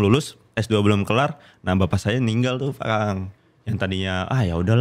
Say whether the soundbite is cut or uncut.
cut